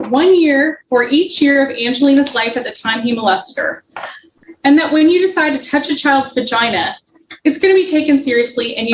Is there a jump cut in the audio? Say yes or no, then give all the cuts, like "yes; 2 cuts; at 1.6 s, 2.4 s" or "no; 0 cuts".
yes; 1 cut; at 4.2 s